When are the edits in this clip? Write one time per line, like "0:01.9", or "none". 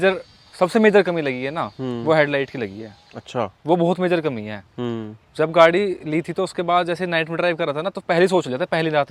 none